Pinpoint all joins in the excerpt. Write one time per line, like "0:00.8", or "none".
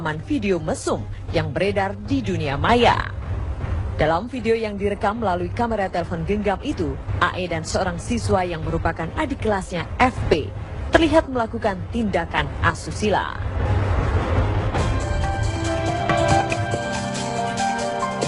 0:10.1